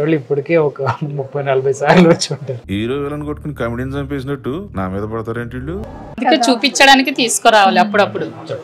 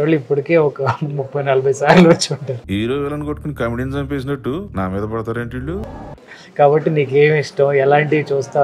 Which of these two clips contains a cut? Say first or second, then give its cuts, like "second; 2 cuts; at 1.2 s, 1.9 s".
first; 1 cut; at 6.2 s